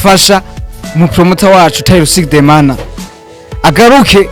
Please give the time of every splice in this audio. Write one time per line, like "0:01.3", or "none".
none